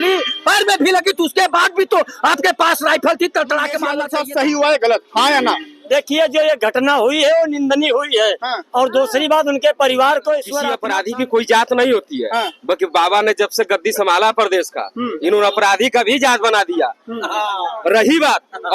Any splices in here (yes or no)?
yes